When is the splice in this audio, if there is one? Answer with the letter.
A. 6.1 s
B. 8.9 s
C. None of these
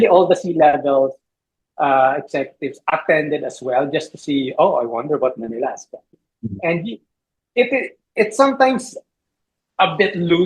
A